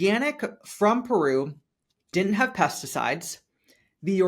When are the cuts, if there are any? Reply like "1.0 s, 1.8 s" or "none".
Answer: 2.1 s